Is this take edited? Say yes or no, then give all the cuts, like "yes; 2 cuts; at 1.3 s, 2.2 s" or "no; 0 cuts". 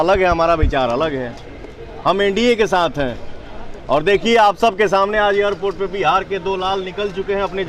no; 0 cuts